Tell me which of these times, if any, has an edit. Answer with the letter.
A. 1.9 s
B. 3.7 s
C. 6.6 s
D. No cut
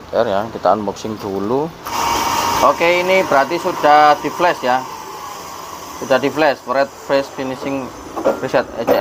A